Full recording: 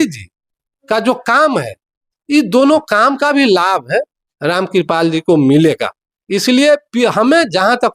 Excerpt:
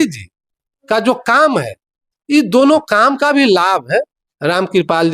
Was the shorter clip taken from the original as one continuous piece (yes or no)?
yes